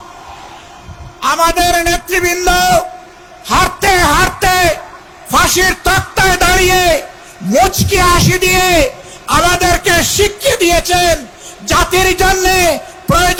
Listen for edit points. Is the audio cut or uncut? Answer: uncut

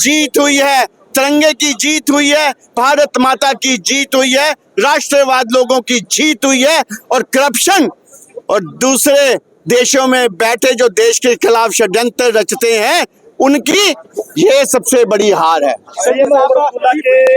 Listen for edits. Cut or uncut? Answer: uncut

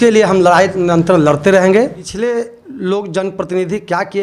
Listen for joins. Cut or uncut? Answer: cut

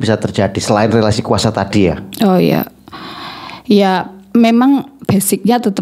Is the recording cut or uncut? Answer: uncut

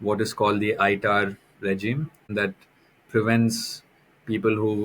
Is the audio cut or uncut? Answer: cut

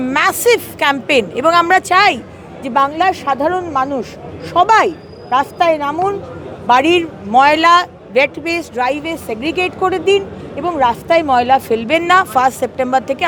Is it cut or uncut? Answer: uncut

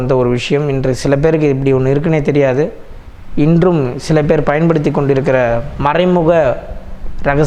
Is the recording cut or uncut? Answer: uncut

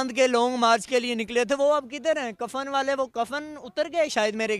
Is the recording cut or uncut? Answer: uncut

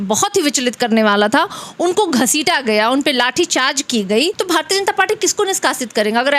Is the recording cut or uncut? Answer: cut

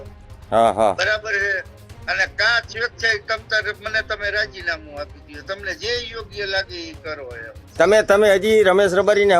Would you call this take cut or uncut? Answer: cut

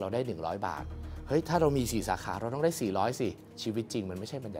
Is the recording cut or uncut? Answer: cut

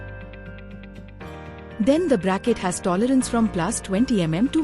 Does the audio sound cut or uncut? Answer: uncut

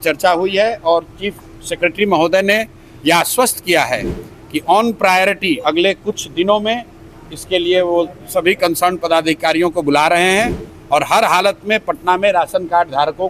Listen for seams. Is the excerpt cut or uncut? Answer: uncut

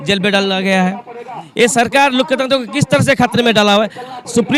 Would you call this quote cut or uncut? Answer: uncut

